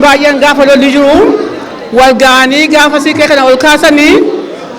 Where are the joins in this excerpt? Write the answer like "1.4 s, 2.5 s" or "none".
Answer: none